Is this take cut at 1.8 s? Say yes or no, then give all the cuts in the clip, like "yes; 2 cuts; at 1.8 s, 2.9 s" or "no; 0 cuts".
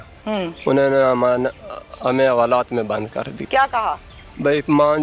no; 1 cut; at 3.4 s